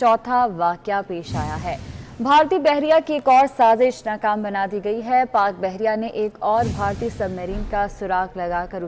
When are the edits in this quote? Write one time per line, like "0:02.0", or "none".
none